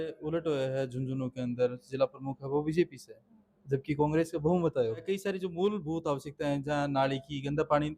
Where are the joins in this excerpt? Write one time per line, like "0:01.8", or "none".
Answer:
0:05.0